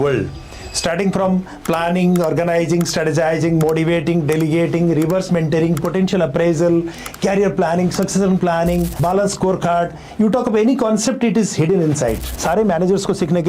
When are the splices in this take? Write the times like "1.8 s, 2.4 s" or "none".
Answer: 9.0 s, 12.3 s